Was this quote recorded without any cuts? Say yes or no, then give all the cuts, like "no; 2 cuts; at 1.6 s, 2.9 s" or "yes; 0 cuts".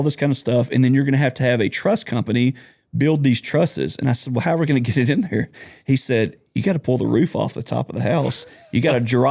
yes; 0 cuts